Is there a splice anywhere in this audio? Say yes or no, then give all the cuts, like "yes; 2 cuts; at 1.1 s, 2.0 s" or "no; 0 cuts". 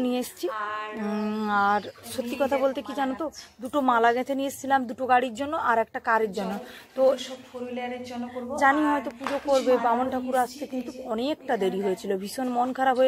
no; 0 cuts